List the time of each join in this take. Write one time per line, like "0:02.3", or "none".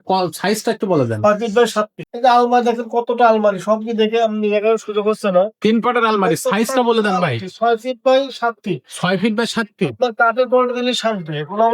0:02.0